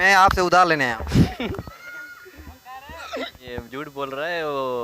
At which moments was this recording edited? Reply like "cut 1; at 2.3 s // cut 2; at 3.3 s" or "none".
cut 1; at 3.5 s